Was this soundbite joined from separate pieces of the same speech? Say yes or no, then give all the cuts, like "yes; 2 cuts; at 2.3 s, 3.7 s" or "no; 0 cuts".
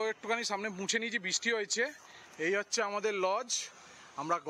no; 0 cuts